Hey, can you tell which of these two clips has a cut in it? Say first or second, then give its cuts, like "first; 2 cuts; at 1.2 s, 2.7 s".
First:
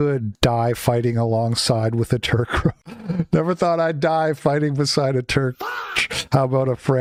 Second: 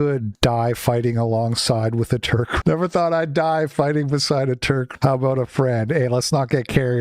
second; 2 cuts; at 2.6 s, 4.9 s